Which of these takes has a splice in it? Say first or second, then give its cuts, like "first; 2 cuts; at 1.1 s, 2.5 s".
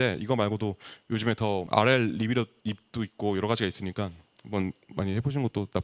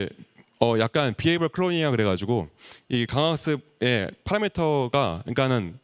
first; 1 cut; at 1.6 s